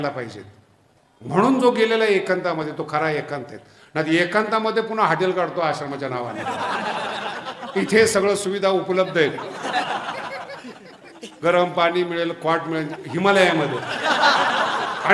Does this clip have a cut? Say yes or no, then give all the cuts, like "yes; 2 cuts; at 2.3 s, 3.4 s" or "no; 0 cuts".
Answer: no; 0 cuts